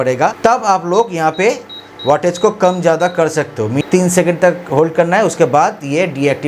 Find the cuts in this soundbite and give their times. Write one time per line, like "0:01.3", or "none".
0:03.8